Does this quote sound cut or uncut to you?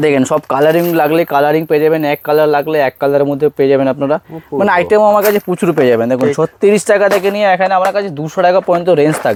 uncut